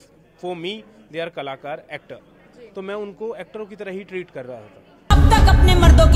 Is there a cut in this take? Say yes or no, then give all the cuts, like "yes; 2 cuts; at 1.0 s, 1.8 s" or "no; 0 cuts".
yes; 1 cut; at 5.1 s